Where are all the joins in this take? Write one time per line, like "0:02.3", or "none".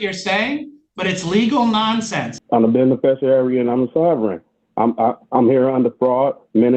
0:02.3